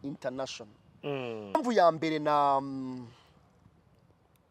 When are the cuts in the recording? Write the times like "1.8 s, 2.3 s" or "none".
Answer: 1.6 s